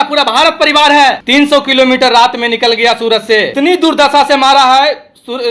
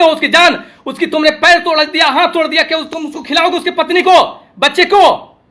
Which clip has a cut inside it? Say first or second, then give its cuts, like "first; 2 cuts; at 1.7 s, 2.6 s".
first; 2 cuts; at 1.2 s, 3.5 s